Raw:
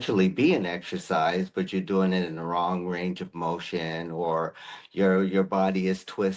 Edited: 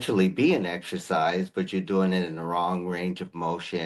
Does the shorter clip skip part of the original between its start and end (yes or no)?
no